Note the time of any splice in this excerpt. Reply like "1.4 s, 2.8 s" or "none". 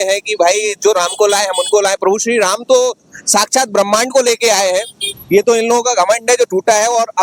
none